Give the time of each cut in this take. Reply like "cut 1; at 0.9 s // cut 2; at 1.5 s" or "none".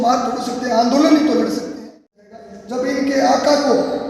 cut 1; at 2.3 s